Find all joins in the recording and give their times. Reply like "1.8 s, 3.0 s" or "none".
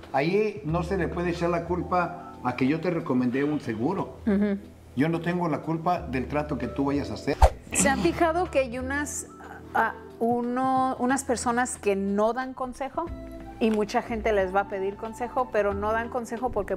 7.4 s